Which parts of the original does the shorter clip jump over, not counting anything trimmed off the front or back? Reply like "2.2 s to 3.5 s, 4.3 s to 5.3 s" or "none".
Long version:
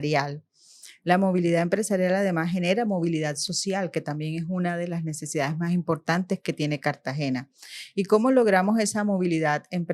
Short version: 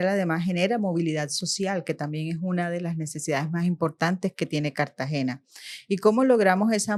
none